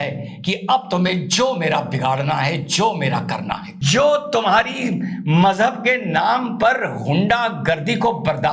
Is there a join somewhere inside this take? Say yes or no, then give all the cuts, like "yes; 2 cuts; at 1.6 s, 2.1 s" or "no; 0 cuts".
yes; 1 cut; at 3.8 s